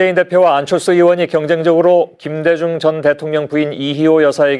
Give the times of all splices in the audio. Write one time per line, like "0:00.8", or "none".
0:01.4

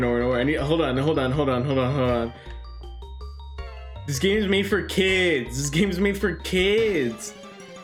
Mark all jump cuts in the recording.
none

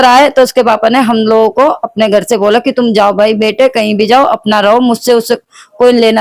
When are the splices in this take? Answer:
none

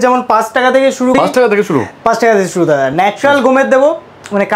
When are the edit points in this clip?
0:01.1

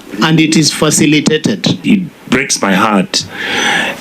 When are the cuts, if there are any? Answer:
0:01.8

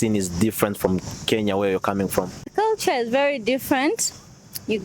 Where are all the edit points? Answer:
0:02.5

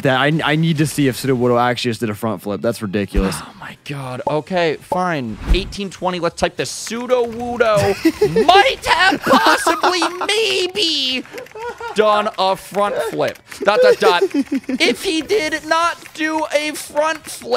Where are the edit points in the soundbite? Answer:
0:05.4

